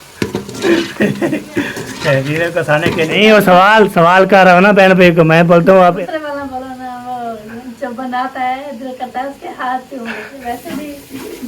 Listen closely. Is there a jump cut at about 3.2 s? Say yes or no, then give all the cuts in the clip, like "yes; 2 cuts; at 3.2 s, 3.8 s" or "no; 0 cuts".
yes; 3 cuts; at 3.2 s, 6.0 s, 10.4 s